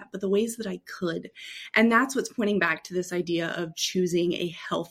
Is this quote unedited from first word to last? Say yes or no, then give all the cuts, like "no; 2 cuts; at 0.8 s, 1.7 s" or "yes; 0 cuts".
yes; 0 cuts